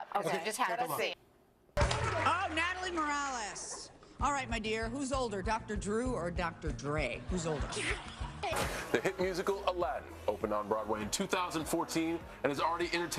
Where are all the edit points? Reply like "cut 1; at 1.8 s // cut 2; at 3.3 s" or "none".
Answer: none